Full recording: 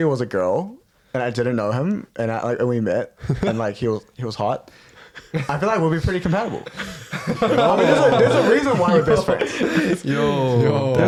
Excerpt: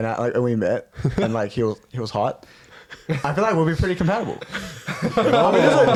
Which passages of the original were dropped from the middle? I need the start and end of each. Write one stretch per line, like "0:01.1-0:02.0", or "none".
none